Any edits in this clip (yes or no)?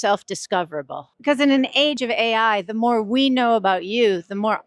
yes